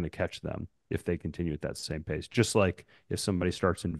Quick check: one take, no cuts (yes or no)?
yes